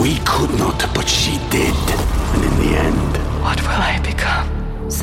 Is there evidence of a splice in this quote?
no; 0 cuts

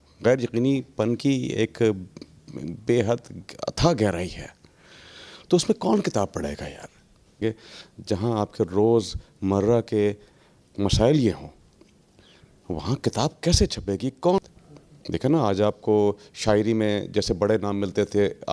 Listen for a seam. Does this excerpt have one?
yes; 2 cuts; at 7.3 s, 14.4 s

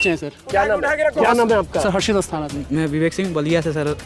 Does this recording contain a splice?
yes; 1 cut; at 2.5 s

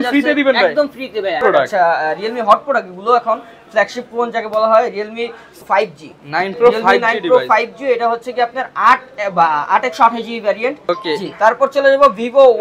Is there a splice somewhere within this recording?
yes; 3 cuts; at 1.4 s, 5.6 s, 10.8 s

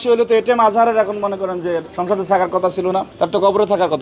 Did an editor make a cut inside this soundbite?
yes; 1 cut; at 1.9 s

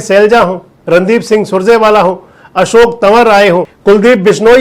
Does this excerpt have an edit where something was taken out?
yes; 1 cut; at 3.7 s

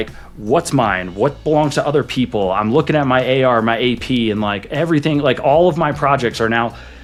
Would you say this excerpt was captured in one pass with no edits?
yes; 0 cuts

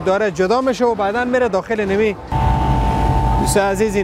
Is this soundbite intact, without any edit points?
no; 1 cut; at 2.3 s

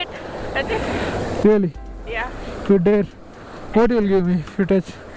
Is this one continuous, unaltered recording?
yes; 0 cuts

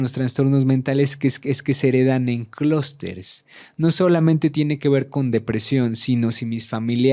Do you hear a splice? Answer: no; 0 cuts

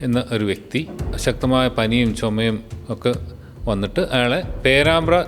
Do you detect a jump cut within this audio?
yes; 1 cut; at 1.2 s

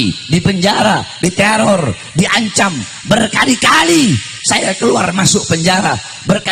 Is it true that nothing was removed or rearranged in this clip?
yes; 0 cuts

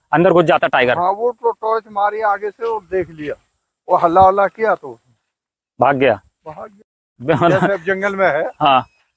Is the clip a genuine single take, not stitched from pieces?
yes; 0 cuts

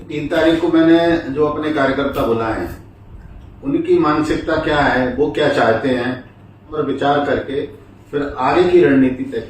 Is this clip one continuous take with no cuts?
no; 1 cut; at 6.7 s

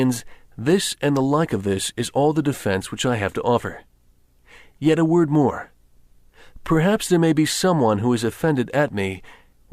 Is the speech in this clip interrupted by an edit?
yes; 1 cut; at 1.5 s

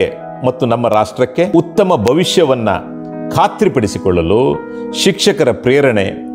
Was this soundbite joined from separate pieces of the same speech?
yes; 1 cut; at 1.5 s

